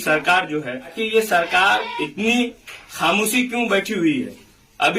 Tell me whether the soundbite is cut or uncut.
cut